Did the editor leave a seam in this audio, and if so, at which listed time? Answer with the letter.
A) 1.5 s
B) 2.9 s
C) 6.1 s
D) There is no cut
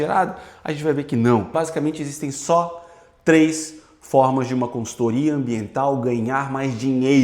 A